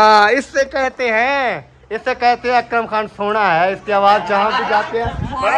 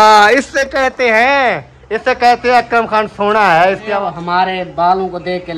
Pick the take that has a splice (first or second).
second